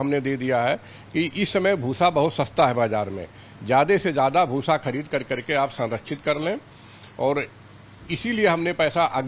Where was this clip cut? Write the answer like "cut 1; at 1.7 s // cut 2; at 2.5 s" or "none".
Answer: none